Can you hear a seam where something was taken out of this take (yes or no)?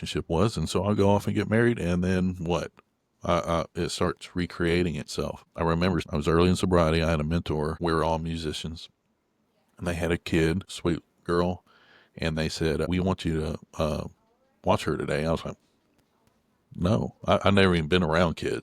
yes